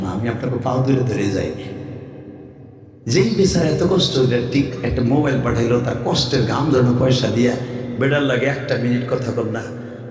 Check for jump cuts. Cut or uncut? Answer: uncut